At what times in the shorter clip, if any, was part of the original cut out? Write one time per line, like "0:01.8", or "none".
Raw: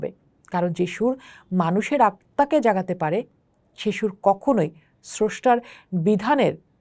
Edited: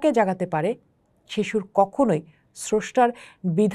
none